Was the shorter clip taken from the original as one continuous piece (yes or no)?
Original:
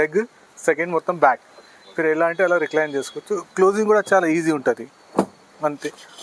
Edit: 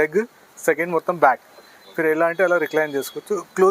yes